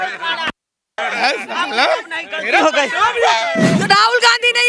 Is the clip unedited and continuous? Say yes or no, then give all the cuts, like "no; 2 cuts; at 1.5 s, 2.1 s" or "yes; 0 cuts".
no; 1 cut; at 3.8 s